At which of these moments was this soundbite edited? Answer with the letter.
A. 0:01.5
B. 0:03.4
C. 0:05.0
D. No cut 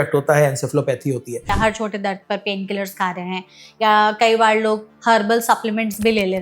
A